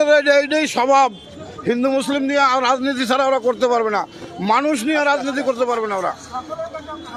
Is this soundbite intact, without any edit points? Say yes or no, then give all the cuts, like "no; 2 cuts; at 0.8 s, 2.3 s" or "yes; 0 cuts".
yes; 0 cuts